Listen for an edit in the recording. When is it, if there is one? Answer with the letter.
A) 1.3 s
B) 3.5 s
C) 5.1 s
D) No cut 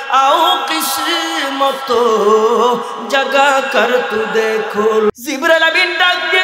C